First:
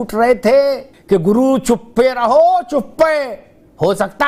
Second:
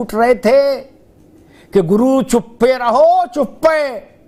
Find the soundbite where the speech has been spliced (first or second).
first